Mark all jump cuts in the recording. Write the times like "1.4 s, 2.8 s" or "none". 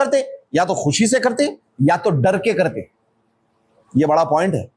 none